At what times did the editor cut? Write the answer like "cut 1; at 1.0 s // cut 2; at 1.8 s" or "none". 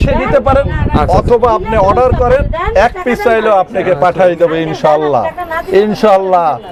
none